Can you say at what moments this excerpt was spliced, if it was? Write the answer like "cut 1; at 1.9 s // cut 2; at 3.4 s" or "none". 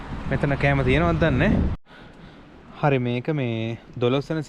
cut 1; at 1.7 s